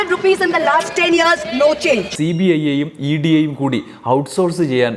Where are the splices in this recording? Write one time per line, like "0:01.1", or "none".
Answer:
0:02.1